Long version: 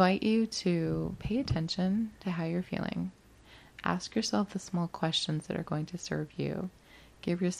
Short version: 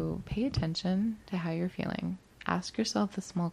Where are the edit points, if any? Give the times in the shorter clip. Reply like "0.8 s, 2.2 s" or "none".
2.3 s